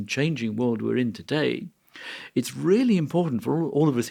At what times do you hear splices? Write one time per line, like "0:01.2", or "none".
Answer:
none